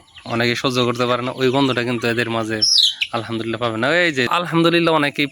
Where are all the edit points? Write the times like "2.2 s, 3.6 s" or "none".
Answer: 4.3 s